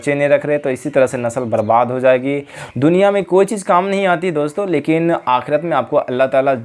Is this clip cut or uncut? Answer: cut